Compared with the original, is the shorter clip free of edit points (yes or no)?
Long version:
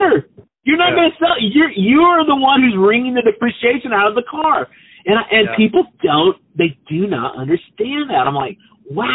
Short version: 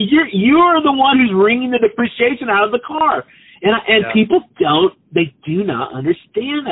yes